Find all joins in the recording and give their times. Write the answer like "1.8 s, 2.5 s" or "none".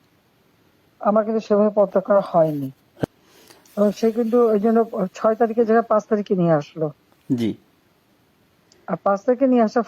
3.0 s